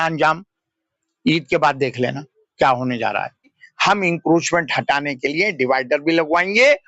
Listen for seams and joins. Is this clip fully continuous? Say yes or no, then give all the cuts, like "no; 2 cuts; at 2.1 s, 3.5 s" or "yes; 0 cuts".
no; 1 cut; at 3.4 s